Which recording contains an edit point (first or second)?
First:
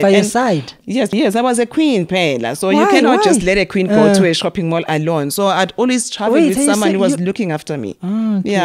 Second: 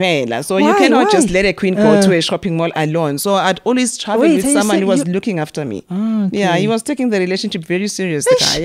first